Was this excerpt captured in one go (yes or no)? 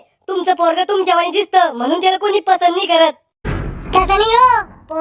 no